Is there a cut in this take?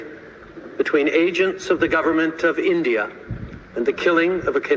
no; 0 cuts

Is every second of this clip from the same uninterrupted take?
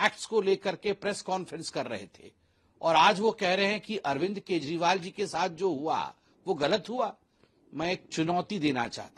yes; 0 cuts

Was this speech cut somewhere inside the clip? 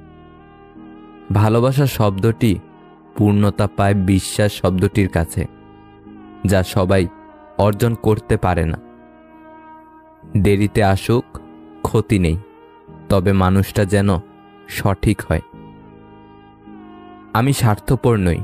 no; 0 cuts

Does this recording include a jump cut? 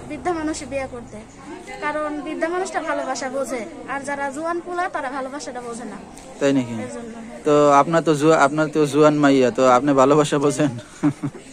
no; 0 cuts

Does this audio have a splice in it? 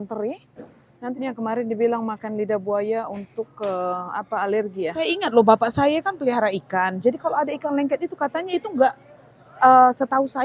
yes; 2 cuts; at 1.2 s, 5.2 s

